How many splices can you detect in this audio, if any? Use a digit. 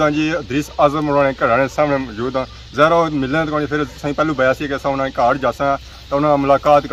0